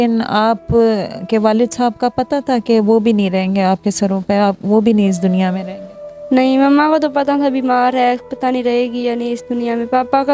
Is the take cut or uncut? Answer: uncut